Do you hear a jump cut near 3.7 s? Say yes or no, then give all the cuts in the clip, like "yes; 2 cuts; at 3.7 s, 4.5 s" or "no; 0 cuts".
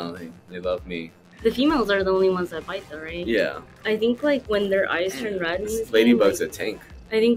yes; 1 cut; at 3.7 s